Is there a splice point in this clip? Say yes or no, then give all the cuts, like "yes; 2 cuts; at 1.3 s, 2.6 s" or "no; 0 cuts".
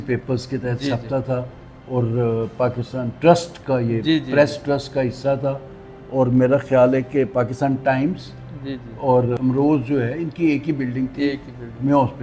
no; 0 cuts